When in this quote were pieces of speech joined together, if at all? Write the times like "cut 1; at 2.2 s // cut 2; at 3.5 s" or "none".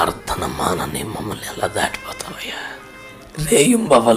cut 1; at 3.2 s